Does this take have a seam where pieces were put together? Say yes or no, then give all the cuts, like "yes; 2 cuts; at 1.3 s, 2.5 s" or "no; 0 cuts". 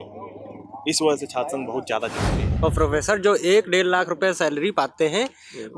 yes; 1 cut; at 2.4 s